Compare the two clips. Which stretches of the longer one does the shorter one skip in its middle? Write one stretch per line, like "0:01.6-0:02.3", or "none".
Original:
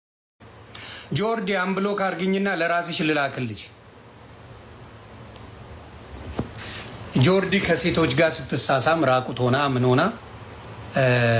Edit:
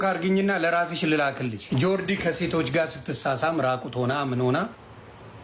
0:03.6-0:07.0

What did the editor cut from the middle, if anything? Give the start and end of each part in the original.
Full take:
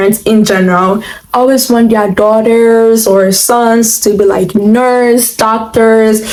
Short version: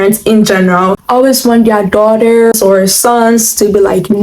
0:01.0-0:01.2
0:02.8-0:03.0

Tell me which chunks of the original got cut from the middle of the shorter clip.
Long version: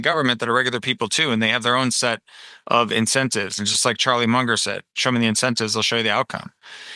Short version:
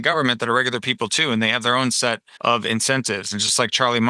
0:02.3-0:02.5

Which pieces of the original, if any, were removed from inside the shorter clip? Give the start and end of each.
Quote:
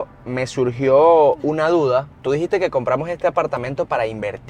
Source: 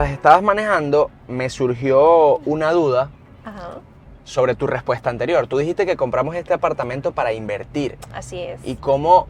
0:03.2-0:05.5

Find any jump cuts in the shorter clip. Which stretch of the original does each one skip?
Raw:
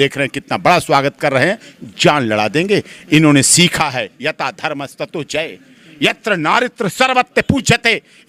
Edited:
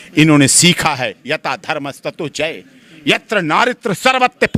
none

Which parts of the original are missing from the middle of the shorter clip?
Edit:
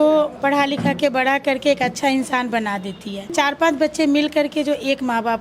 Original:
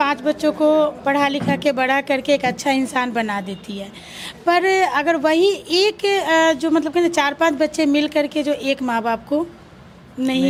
0:04.0-0:07.1

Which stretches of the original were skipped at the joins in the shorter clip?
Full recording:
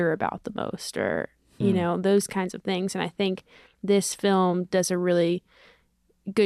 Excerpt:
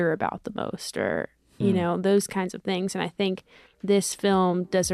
none

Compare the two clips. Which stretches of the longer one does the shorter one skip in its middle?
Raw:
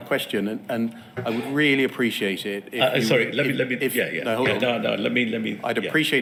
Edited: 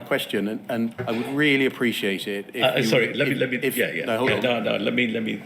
0:01.0-0:01.2

